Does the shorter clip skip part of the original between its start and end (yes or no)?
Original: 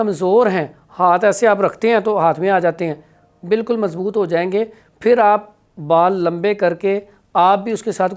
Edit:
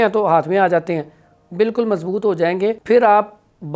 yes